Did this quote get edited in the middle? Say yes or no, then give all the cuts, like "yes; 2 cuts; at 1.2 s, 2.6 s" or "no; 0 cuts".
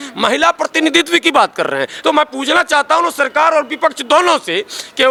no; 0 cuts